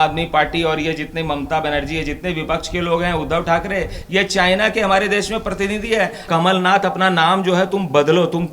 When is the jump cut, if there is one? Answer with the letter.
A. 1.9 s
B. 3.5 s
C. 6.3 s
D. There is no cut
C